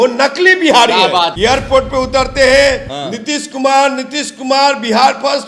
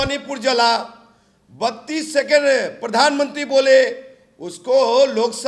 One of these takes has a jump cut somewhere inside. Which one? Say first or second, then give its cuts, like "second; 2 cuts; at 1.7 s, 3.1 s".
first; 1 cut; at 1.3 s